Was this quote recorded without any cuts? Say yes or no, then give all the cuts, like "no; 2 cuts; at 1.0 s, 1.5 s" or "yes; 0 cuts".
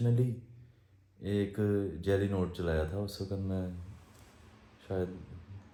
yes; 0 cuts